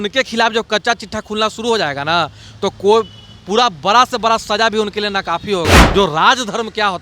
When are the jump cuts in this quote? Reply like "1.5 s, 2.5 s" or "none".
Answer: 5.8 s